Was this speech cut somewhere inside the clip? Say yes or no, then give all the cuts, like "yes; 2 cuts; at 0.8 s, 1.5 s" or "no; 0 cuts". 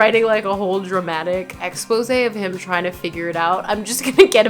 yes; 1 cut; at 1.7 s